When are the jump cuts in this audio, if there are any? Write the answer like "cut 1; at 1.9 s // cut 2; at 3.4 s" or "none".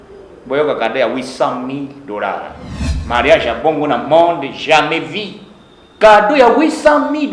cut 1; at 2.9 s